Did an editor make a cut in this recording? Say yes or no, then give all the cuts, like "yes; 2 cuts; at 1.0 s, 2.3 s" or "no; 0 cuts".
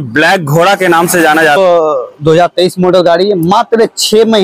yes; 1 cut; at 1.6 s